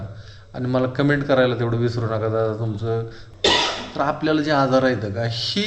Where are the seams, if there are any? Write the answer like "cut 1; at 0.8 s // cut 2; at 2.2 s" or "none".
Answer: cut 1; at 3.2 s